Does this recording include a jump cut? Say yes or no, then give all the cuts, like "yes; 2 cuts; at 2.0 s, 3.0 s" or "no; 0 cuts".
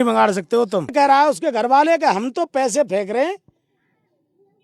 yes; 1 cut; at 0.9 s